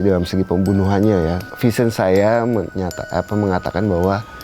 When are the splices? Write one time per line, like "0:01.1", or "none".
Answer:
0:01.5

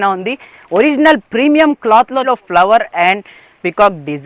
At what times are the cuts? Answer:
0:02.2

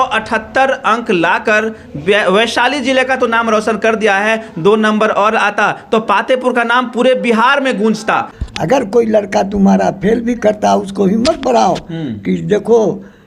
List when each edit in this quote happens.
0:08.4

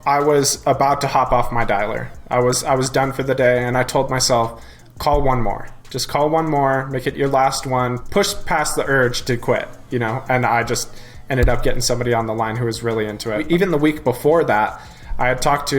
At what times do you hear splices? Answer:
0:08.0
0:13.4

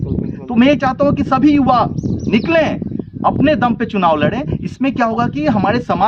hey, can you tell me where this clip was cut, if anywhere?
none

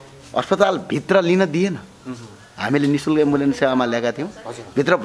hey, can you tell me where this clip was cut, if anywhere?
none

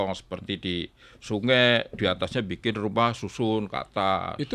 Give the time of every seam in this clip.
none

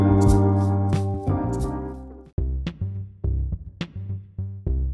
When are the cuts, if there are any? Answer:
0:02.2

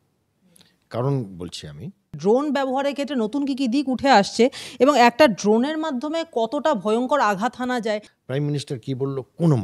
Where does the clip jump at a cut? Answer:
0:02.2
0:08.1

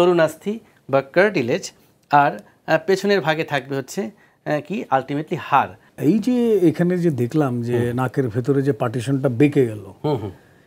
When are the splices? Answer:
0:05.8

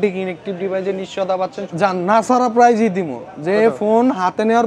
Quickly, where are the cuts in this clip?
0:01.6

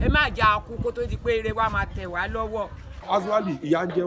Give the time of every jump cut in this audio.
0:03.0

